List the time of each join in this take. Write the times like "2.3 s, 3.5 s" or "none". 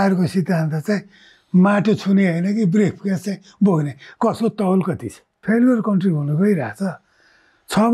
5.4 s